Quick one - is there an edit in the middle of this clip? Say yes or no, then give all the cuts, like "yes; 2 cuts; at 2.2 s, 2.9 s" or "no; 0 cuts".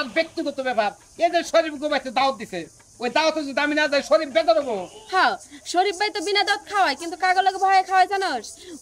no; 0 cuts